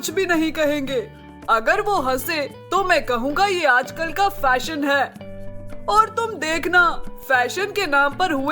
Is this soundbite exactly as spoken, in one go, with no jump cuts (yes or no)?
yes